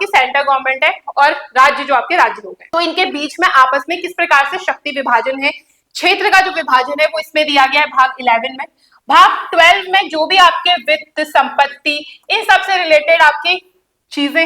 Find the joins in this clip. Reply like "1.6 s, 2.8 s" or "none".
none